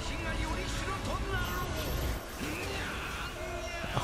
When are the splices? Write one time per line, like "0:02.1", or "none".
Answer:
none